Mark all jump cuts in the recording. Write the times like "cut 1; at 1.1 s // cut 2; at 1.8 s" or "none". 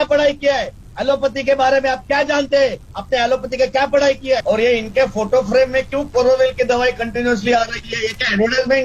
cut 1; at 4.4 s